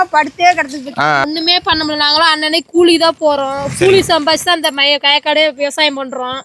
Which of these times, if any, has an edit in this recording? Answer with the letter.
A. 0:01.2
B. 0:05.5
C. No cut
A